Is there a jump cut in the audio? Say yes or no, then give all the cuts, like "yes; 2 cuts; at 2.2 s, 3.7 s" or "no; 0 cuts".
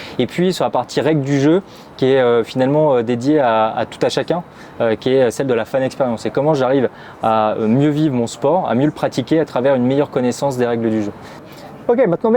yes; 1 cut; at 11.5 s